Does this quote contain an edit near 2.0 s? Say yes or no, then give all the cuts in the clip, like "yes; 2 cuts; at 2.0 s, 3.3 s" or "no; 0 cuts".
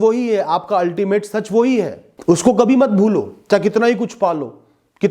yes; 1 cut; at 2.0 s